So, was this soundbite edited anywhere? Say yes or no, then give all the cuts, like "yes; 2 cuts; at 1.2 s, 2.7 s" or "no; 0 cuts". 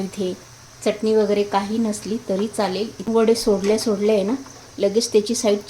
yes; 2 cuts; at 1.0 s, 3.1 s